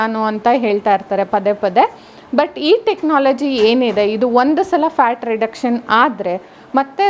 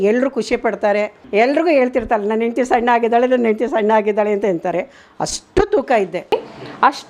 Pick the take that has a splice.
second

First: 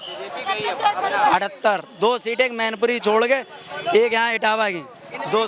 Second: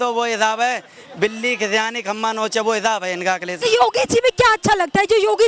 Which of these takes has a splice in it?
second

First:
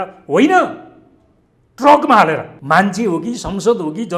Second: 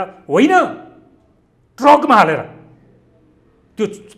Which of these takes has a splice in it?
first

